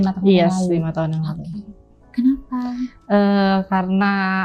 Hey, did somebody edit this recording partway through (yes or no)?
no